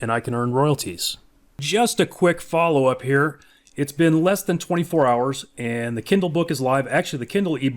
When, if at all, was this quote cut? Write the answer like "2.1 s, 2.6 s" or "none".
1.6 s